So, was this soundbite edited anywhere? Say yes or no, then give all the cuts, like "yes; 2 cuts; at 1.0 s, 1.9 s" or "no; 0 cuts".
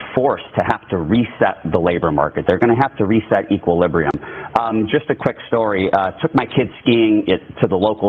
yes; 2 cuts; at 2.8 s, 5.8 s